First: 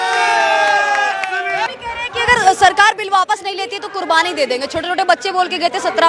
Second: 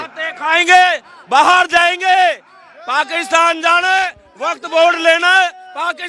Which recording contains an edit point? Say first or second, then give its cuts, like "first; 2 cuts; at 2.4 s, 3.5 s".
first; 1 cut; at 1.7 s